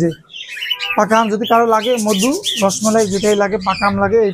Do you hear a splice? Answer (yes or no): no